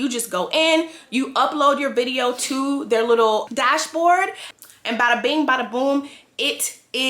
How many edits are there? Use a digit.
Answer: 1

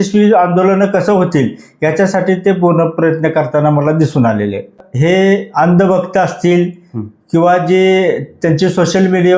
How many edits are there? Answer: 1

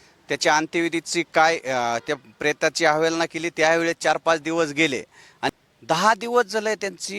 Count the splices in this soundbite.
1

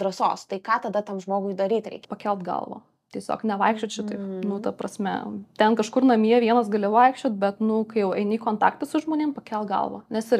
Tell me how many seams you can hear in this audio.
1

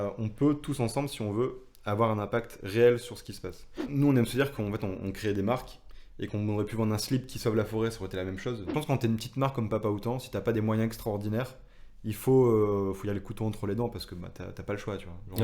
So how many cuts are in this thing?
2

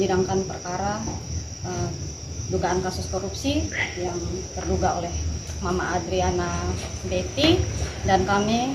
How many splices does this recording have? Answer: 0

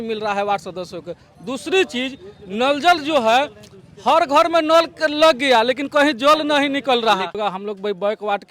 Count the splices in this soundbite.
1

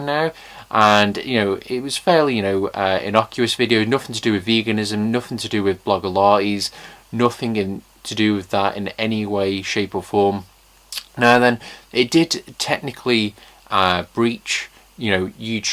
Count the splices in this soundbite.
1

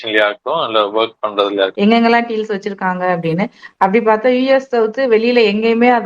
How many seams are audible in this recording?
1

